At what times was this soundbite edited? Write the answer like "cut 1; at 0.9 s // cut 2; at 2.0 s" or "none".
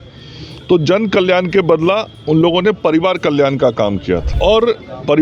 cut 1; at 4.3 s